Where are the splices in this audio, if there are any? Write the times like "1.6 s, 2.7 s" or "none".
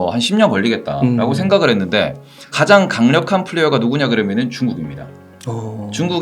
2.5 s

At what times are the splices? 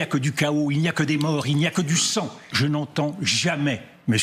2.4 s

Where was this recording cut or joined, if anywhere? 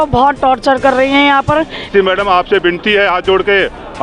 1.9 s

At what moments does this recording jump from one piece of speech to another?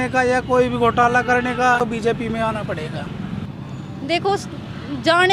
1.8 s, 3.5 s

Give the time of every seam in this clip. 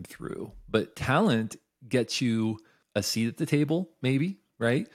2.7 s

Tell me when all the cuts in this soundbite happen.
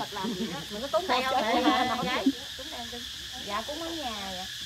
none

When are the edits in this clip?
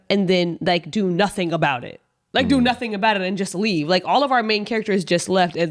none

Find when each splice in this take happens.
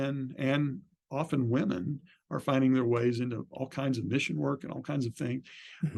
none

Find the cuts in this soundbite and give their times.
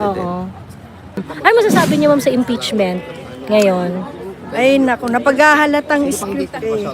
1.2 s

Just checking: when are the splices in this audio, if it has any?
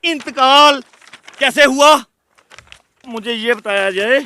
3.1 s

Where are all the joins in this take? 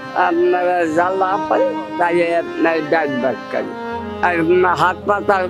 3.8 s

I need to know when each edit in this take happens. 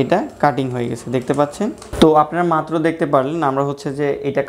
1.8 s

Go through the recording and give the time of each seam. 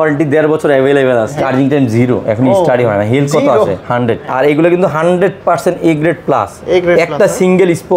1.4 s, 4.3 s

